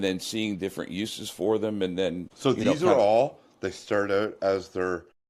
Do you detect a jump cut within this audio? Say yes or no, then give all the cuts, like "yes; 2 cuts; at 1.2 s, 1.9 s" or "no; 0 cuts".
yes; 1 cut; at 2.3 s